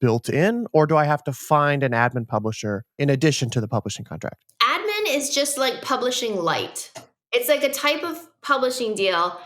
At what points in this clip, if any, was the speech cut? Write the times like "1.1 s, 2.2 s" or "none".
2.9 s, 4.4 s, 7.2 s

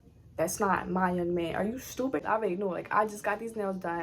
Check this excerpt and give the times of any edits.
2.2 s

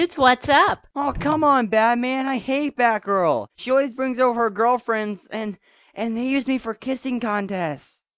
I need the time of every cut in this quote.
none

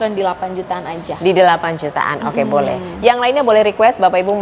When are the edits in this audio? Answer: none

